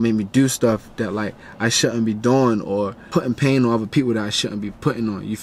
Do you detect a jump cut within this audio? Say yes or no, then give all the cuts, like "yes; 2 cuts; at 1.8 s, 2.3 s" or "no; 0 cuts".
yes; 1 cut; at 3.0 s